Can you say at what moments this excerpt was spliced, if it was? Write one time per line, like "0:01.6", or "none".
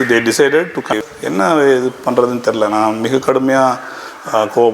0:01.0